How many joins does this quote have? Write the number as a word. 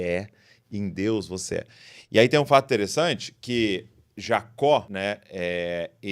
one